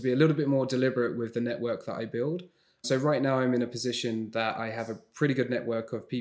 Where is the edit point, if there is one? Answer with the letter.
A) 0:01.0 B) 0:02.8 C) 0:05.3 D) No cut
B